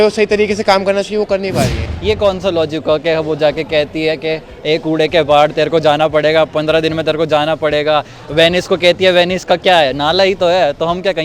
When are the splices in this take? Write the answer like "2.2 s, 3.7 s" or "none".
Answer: 1.9 s